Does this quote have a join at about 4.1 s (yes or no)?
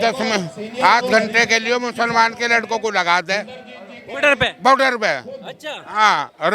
no